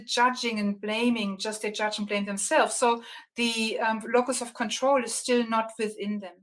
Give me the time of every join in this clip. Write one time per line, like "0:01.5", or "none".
none